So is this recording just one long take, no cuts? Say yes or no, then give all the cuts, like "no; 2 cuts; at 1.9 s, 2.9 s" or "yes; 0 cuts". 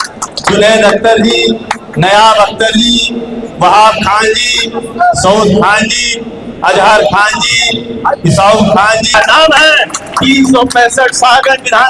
no; 1 cut; at 9.1 s